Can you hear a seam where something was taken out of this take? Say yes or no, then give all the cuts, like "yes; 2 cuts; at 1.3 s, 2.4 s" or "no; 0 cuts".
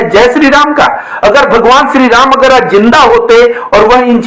no; 0 cuts